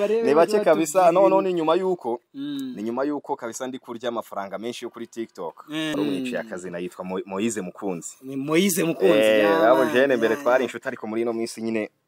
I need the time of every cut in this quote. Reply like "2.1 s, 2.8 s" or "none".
5.9 s